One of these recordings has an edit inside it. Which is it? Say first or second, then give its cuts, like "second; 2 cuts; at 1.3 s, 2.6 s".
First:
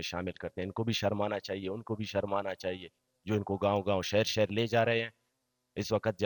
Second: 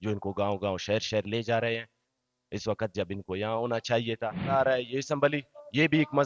second; 1 cut; at 4.4 s